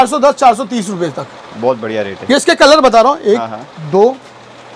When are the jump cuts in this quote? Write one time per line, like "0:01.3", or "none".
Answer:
none